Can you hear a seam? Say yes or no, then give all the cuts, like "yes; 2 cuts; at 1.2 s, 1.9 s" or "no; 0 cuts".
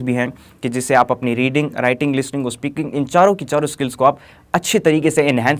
no; 0 cuts